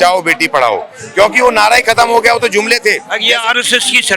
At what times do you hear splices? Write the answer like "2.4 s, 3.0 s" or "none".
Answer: 3.1 s